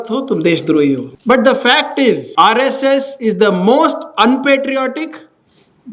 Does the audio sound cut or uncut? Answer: cut